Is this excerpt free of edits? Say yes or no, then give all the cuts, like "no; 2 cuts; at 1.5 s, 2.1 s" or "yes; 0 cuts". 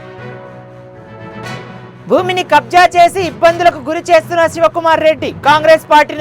yes; 0 cuts